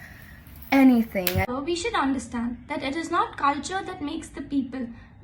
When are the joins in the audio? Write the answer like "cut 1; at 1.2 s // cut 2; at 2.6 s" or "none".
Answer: cut 1; at 1.5 s